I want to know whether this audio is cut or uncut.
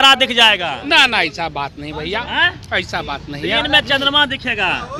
uncut